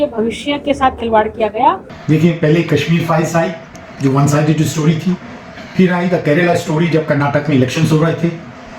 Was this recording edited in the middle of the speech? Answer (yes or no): yes